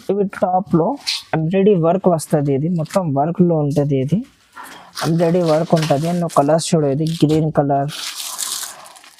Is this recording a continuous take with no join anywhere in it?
yes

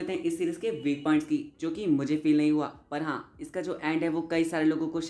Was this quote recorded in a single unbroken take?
yes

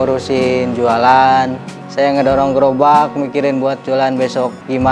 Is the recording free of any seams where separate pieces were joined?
no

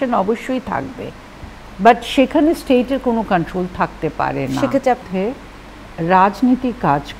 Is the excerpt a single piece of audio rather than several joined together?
no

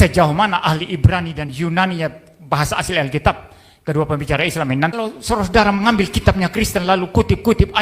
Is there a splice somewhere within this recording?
yes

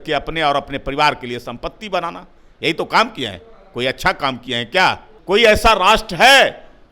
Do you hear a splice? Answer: yes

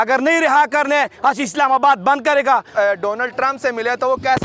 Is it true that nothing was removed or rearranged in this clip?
no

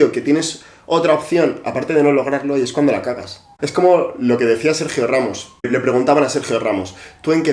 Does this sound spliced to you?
yes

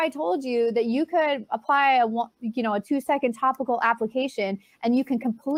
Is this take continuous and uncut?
yes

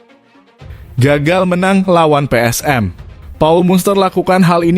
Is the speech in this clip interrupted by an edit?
yes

